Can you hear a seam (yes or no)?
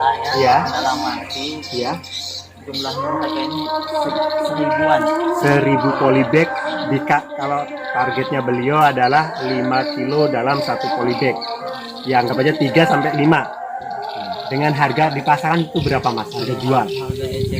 no